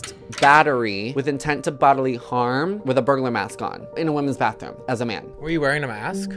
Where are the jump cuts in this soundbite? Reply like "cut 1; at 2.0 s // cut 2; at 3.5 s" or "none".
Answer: cut 1; at 1.1 s // cut 2; at 2.8 s